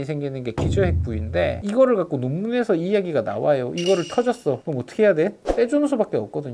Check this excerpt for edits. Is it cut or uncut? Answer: cut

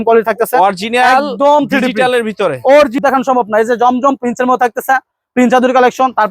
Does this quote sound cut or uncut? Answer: cut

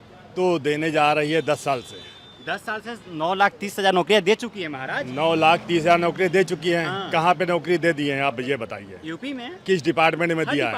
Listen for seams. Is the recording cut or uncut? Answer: uncut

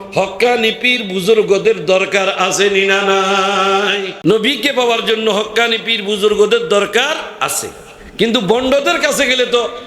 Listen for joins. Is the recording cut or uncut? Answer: cut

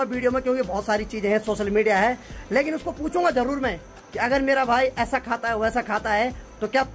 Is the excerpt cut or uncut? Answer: uncut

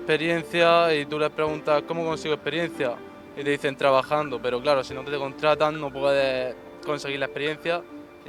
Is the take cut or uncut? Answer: uncut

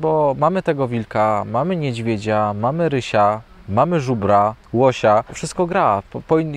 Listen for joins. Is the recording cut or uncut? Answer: cut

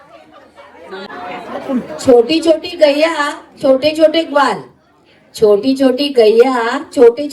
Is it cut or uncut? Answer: cut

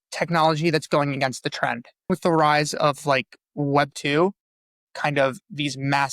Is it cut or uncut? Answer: cut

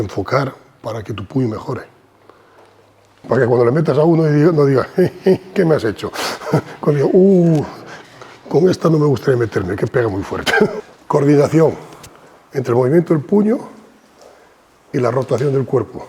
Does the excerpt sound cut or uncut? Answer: cut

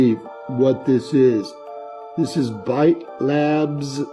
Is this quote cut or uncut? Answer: uncut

